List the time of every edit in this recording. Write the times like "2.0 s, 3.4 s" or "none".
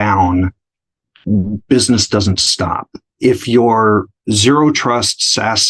3.1 s, 4.1 s